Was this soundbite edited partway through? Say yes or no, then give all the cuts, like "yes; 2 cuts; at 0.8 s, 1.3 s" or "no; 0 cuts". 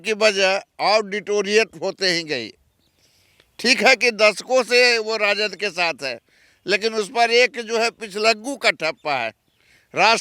no; 0 cuts